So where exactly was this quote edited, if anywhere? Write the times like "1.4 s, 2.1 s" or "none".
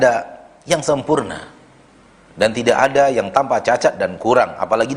none